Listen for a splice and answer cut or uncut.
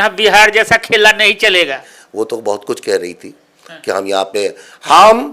cut